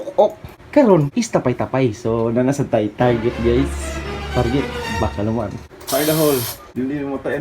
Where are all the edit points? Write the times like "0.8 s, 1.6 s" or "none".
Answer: 5.7 s